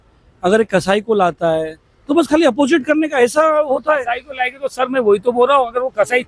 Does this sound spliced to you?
no; 0 cuts

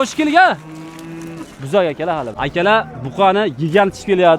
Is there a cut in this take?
yes; 1 cut; at 2.3 s

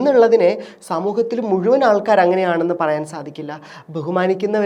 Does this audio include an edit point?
no; 0 cuts

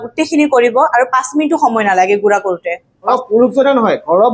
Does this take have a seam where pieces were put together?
yes; 1 cut; at 3.1 s

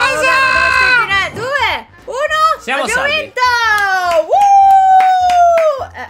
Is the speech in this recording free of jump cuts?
no; 1 cut; at 1.3 s

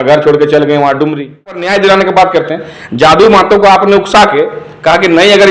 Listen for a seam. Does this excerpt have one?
yes; 1 cut; at 1.6 s

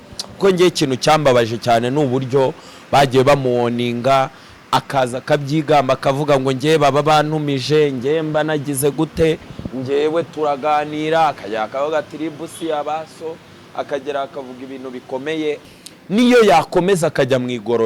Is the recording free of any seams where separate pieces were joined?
no; 1 cut; at 15.6 s

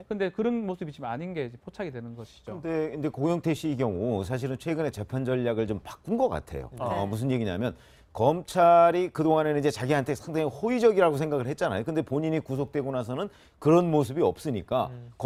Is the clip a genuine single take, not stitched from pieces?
yes; 0 cuts

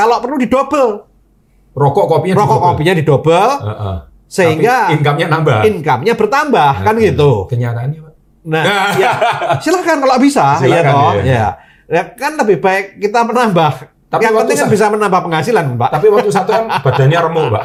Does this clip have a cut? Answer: no; 0 cuts

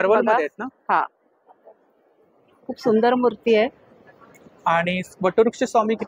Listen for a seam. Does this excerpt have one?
no; 0 cuts

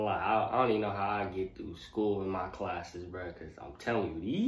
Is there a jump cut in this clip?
no; 0 cuts

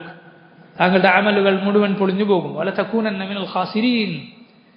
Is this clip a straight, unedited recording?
yes; 0 cuts

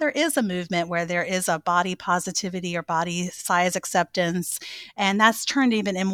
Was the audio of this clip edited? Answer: no; 0 cuts

